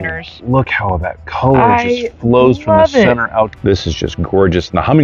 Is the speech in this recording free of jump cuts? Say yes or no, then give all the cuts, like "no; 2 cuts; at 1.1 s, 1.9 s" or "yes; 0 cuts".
no; 1 cut; at 3.5 s